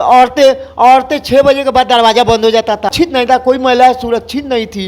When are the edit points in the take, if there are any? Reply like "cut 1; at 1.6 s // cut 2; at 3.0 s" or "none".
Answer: cut 1; at 2.9 s